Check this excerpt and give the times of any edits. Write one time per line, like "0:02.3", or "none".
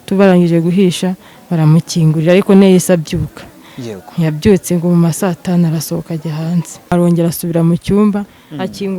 0:06.9